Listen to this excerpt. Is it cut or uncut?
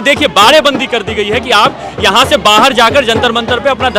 uncut